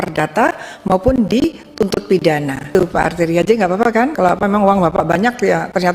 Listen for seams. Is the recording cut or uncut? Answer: cut